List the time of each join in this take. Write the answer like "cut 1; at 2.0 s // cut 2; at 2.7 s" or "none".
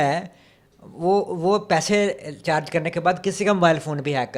none